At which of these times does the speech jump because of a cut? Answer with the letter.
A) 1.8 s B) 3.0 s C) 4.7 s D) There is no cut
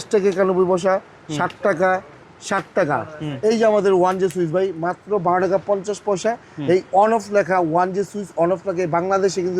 D